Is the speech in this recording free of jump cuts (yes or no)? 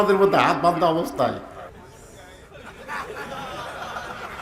no